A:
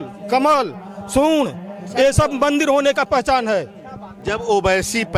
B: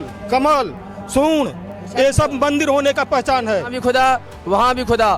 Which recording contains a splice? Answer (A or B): B